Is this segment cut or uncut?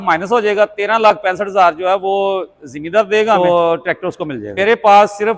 cut